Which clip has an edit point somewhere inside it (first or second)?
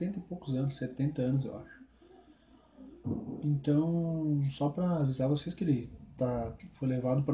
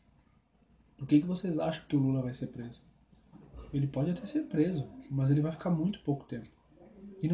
first